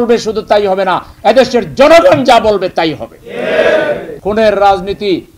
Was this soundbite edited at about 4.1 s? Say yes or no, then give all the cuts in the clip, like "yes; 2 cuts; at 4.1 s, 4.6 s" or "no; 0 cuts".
yes; 1 cut; at 4.1 s